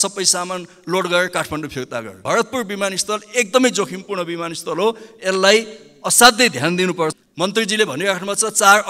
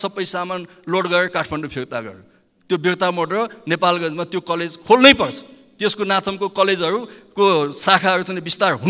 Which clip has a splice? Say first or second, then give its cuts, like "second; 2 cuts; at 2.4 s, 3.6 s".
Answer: first; 2 cuts; at 2.2 s, 7.1 s